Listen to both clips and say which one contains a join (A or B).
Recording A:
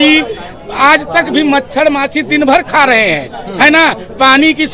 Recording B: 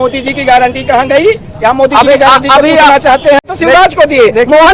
B